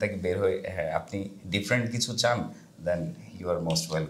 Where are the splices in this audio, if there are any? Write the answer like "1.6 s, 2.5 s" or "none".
none

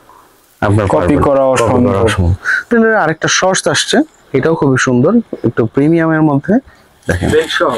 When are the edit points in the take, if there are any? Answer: 2.7 s

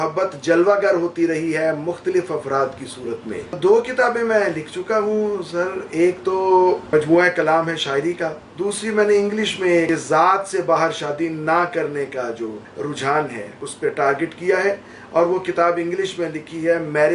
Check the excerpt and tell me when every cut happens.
3.6 s, 6.9 s, 8.4 s, 9.9 s, 12.6 s, 13.7 s

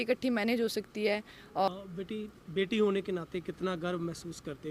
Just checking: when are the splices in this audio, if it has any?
1.7 s

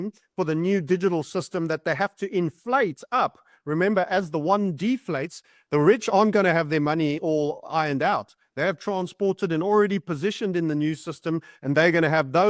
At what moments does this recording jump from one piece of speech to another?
none

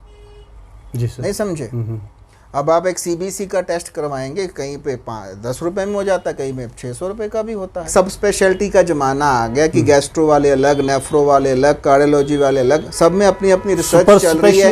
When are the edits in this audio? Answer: 7.9 s

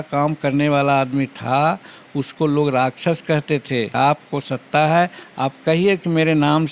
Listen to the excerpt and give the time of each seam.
3.9 s

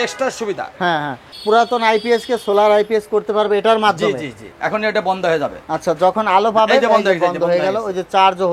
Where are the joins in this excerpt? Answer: 1.3 s, 4.5 s

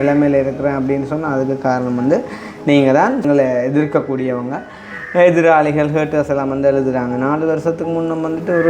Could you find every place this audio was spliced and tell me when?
3.2 s

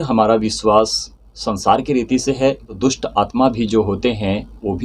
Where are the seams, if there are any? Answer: 2.7 s

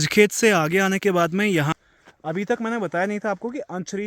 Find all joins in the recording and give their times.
1.7 s

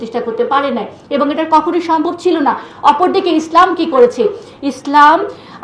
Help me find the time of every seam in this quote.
none

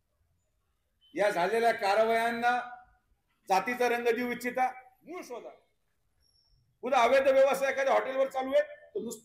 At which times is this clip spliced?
4.9 s

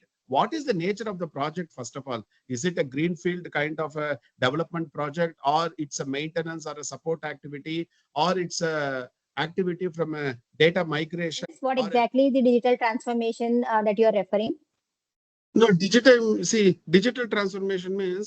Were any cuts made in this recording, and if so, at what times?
11.6 s

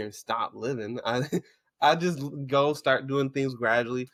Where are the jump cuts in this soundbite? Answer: none

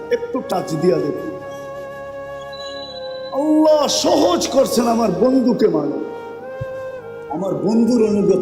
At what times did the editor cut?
6.1 s, 7.3 s

